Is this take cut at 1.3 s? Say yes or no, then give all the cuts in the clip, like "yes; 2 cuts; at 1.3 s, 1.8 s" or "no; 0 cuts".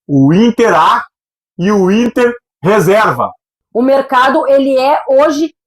no; 1 cut; at 3.6 s